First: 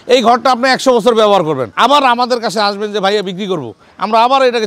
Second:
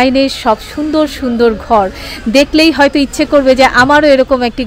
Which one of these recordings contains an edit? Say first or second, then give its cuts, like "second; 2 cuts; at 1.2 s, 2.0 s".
first; 1 cut; at 1.7 s